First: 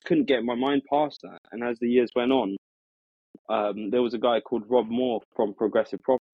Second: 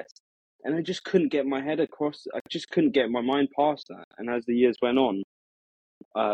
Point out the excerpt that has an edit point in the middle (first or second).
first